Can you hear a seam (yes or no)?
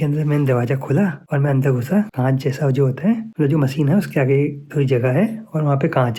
no